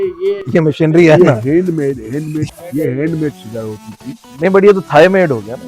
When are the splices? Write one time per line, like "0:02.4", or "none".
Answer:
0:02.5